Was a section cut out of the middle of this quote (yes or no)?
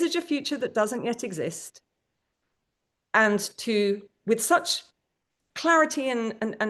no